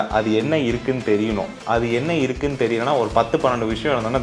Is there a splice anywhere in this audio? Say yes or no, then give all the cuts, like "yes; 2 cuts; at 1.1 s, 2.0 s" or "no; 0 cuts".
no; 0 cuts